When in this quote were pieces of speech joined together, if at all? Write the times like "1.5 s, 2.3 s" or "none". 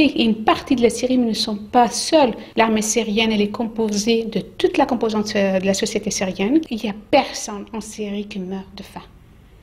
2.4 s, 6.7 s